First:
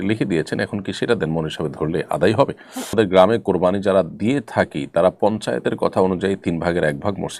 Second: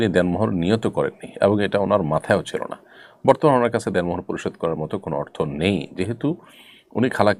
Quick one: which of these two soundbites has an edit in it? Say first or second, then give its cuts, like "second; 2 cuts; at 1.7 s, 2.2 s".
first; 1 cut; at 2.9 s